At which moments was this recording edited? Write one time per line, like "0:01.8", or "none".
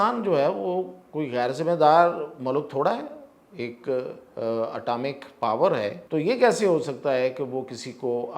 0:06.0